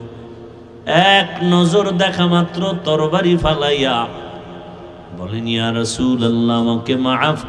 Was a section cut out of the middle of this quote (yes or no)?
no